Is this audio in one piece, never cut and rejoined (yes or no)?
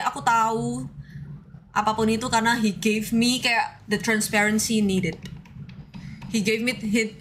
yes